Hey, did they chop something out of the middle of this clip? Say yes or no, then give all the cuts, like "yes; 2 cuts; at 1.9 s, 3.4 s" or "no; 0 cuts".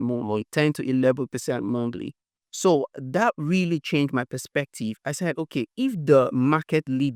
no; 0 cuts